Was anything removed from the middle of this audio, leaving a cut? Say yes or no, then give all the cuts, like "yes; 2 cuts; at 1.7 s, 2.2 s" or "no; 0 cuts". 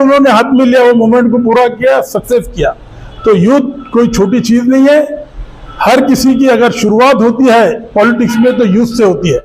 no; 0 cuts